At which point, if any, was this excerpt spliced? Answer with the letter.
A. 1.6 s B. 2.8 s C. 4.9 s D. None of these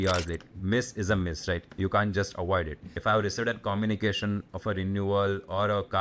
B